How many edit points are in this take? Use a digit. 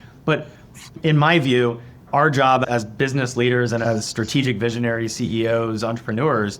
1